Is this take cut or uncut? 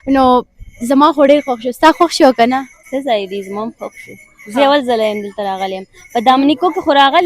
cut